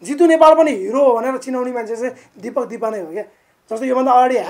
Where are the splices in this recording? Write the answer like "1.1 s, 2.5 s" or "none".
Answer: none